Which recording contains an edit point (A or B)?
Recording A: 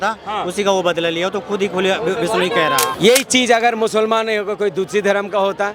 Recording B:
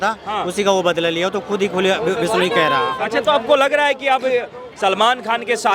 A